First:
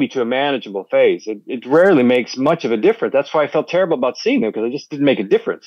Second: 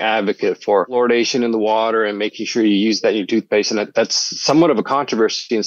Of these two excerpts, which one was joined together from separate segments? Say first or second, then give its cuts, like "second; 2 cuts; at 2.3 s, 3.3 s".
second; 1 cut; at 1.0 s